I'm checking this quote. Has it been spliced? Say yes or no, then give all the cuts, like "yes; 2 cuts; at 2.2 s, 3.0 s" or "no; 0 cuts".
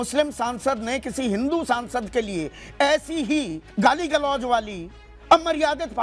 no; 0 cuts